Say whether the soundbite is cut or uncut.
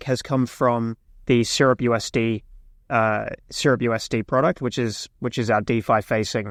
uncut